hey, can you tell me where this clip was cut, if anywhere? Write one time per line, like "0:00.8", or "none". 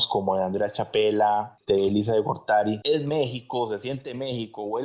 0:01.5
0:02.8